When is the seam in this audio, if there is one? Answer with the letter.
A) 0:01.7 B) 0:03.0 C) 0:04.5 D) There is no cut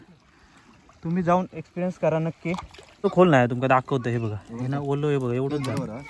B